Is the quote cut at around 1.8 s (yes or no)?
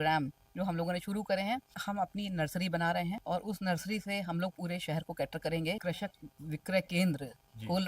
yes